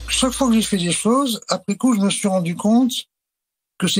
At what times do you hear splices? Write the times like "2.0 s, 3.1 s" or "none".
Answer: none

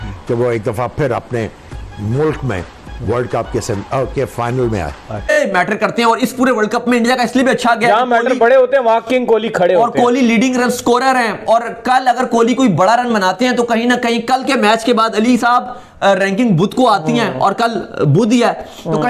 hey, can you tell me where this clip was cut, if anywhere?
5.3 s

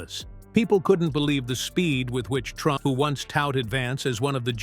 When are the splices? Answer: 2.8 s

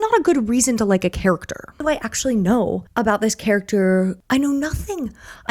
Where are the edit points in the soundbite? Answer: 1.8 s, 2.8 s, 4.2 s

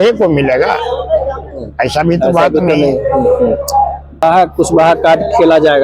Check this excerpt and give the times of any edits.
4.2 s

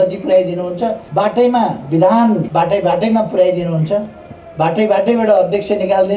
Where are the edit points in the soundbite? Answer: 1.0 s, 2.5 s

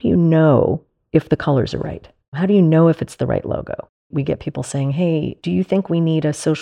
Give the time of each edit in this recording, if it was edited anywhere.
0.9 s, 2.3 s, 4.1 s

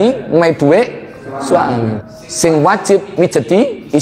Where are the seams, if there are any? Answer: 2.0 s

